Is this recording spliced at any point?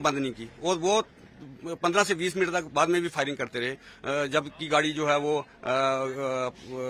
no; 0 cuts

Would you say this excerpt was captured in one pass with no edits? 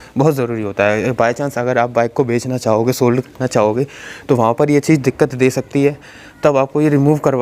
yes; 0 cuts

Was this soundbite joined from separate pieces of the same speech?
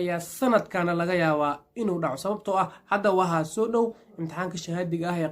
no; 0 cuts

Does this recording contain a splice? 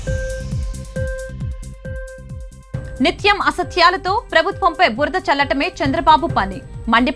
no; 0 cuts

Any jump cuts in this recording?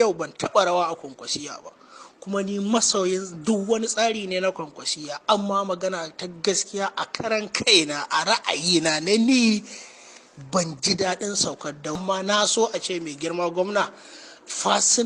yes; 1 cut; at 12.0 s

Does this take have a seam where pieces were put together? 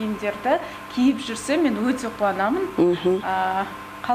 no; 0 cuts

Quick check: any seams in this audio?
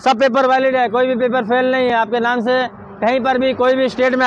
no; 0 cuts

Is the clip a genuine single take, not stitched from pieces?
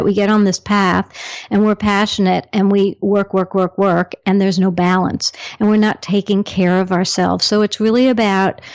yes; 0 cuts

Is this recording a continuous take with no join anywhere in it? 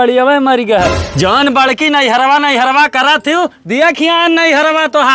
no; 1 cut; at 1.0 s

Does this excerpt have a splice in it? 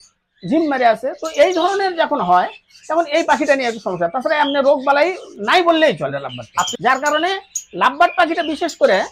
yes; 1 cut; at 6.7 s

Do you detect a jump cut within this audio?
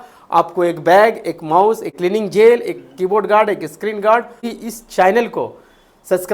yes; 2 cuts; at 1.9 s, 4.5 s

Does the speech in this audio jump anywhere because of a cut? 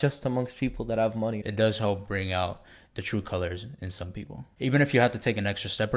yes; 2 cuts; at 1.4 s, 4.3 s

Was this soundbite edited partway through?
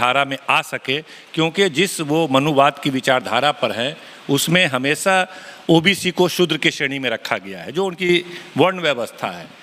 no; 0 cuts

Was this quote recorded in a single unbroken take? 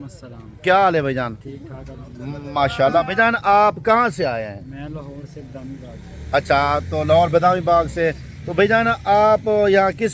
yes; 0 cuts

